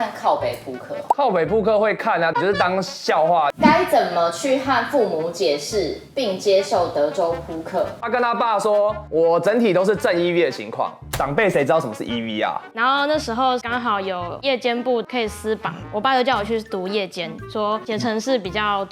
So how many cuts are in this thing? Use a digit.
4